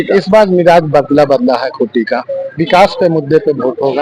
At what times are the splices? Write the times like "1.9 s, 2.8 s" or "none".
none